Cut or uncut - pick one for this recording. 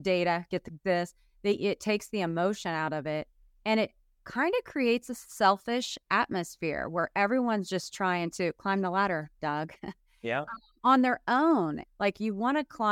cut